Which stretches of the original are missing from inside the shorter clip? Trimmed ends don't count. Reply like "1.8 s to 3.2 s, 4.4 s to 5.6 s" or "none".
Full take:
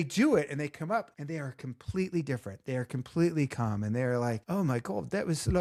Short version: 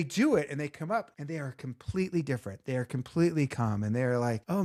none